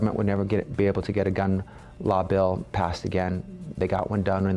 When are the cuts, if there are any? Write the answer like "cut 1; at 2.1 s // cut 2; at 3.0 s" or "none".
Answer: none